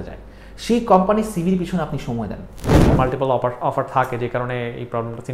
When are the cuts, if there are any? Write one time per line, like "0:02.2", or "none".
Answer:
0:02.9